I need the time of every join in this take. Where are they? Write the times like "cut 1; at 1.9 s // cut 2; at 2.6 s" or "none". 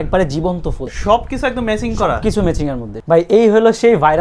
cut 1; at 0.9 s // cut 2; at 2.9 s

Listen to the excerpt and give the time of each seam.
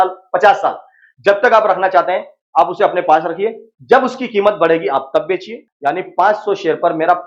cut 1; at 5.6 s

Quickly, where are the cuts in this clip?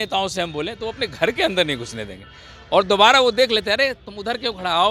none

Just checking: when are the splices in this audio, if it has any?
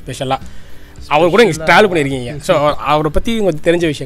none

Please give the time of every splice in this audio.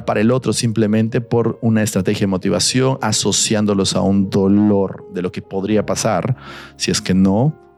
none

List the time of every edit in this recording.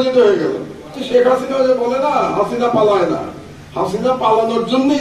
cut 1; at 1.0 s

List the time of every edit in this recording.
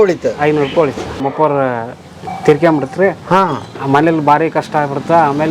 cut 1; at 1.2 s

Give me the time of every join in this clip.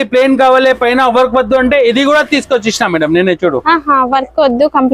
none

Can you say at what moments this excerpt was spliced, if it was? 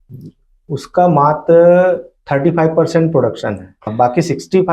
cut 1; at 3.8 s

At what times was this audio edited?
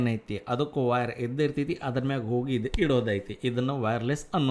none

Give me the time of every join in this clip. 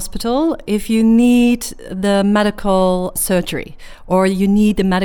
cut 1; at 3.2 s

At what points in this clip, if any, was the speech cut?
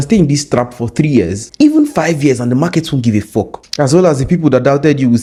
none

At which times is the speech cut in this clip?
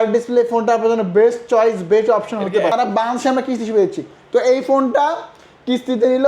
cut 1; at 2.7 s

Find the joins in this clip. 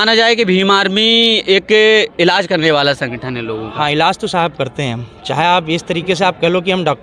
none

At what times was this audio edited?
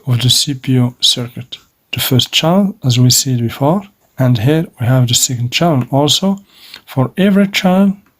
cut 1; at 1.7 s // cut 2; at 4.0 s

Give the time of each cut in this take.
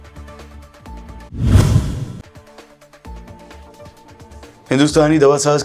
cut 1; at 1.3 s

